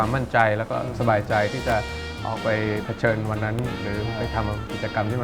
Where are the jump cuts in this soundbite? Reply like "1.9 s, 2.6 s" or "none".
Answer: none